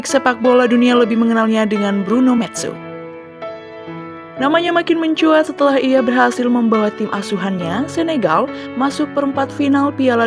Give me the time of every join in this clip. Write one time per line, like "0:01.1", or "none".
0:02.8
0:04.4